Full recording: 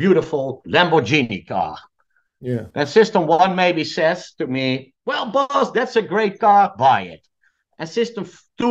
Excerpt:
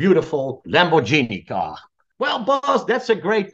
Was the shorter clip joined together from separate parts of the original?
yes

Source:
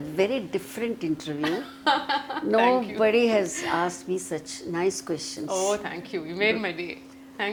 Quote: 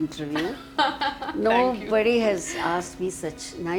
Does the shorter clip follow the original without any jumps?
yes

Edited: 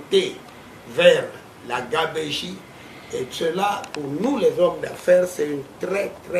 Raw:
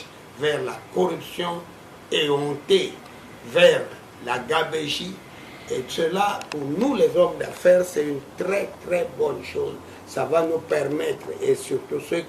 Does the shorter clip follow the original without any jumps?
yes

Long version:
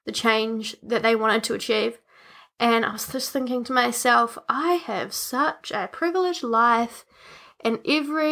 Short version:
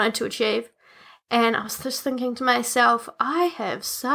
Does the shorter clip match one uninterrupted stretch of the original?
yes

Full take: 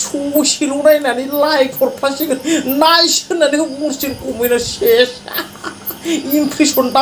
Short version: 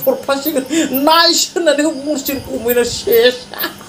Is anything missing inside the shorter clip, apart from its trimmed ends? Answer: no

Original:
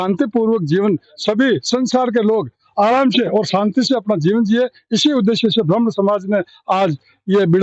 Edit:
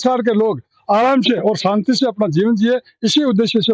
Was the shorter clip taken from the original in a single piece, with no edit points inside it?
yes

